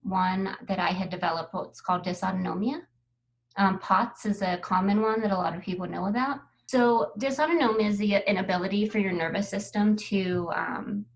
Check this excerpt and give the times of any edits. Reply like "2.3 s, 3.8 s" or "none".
6.5 s